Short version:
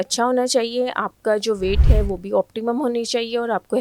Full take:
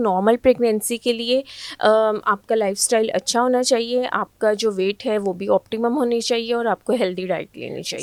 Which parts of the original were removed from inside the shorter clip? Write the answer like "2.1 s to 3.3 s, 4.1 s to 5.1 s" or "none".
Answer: none